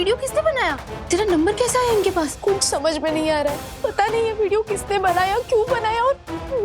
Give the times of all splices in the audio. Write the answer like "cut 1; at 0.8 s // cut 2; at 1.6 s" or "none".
cut 1; at 0.9 s // cut 2; at 2.3 s // cut 3; at 3.7 s